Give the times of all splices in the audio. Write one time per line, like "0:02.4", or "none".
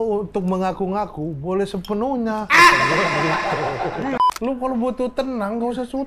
0:04.2